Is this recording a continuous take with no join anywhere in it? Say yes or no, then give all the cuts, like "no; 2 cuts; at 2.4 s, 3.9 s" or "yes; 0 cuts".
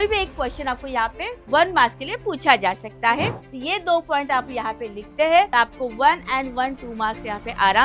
no; 2 cuts; at 3.4 s, 5.5 s